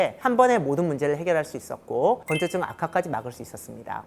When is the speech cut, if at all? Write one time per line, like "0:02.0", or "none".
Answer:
0:02.2